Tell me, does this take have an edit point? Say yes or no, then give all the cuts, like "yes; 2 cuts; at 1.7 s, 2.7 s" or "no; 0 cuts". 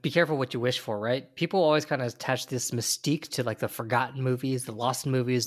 no; 0 cuts